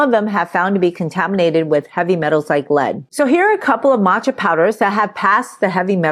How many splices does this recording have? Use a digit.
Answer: 1